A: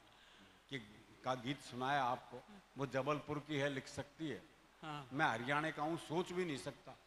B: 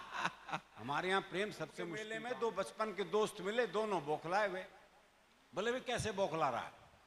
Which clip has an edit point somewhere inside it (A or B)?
B